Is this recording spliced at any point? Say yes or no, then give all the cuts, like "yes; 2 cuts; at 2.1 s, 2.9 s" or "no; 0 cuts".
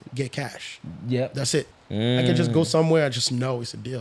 yes; 1 cut; at 1.8 s